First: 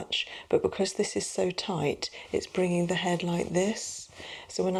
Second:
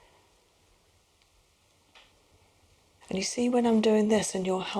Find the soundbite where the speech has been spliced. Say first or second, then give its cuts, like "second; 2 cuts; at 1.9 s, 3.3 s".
second; 1 cut; at 3.0 s